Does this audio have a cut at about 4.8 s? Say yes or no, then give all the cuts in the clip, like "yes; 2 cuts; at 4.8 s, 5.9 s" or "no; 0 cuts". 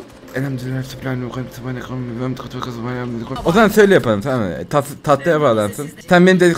no; 1 cut; at 3.3 s